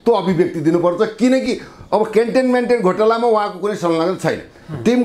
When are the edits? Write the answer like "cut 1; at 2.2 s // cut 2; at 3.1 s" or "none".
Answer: none